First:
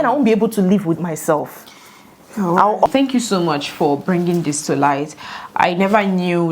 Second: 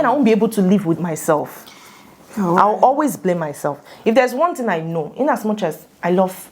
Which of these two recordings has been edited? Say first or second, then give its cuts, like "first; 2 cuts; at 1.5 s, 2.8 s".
first; 1 cut; at 2.9 s